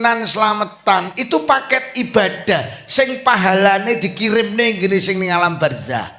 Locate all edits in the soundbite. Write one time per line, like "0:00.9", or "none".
none